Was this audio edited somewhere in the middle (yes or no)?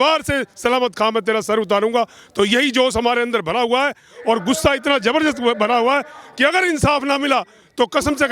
no